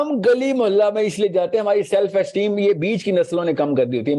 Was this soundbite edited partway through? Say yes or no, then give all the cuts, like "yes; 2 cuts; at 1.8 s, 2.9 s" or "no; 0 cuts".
no; 0 cuts